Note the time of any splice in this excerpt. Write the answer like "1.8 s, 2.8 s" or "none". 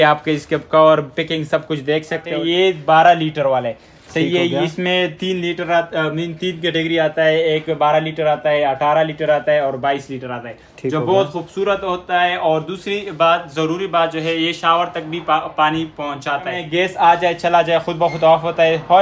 2.3 s, 16.6 s